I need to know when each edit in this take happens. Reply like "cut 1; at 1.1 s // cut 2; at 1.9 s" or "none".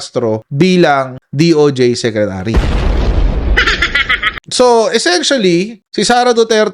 cut 1; at 4.4 s